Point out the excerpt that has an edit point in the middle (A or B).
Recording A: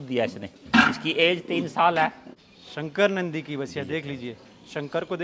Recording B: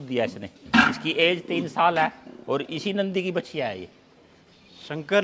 A